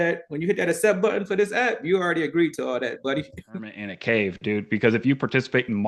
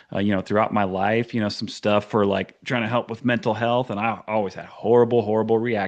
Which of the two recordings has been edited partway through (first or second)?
first